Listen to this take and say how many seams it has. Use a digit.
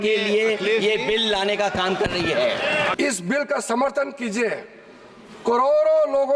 1